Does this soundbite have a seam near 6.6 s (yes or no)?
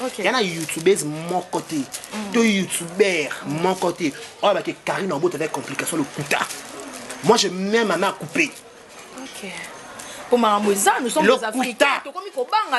no